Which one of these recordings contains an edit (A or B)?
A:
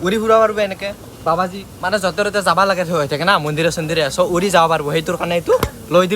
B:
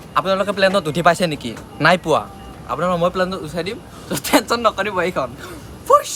A